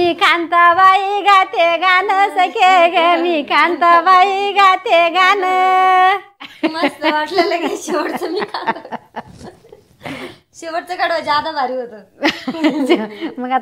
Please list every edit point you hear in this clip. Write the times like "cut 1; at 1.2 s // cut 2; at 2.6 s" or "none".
cut 1; at 6.5 s // cut 2; at 10.4 s